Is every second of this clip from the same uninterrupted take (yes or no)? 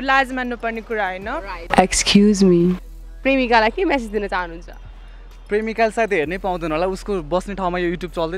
no